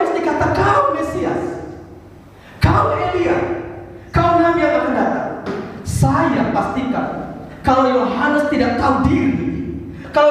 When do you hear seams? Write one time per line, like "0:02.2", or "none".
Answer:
none